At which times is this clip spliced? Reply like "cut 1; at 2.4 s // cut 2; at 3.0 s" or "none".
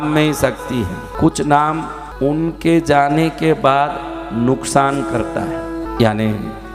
cut 1; at 1.1 s // cut 2; at 2.0 s // cut 3; at 5.9 s